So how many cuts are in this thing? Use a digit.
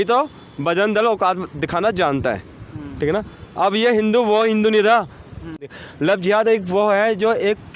1